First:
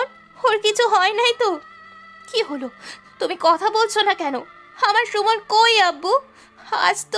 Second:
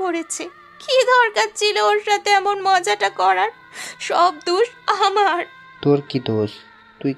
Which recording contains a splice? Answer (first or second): second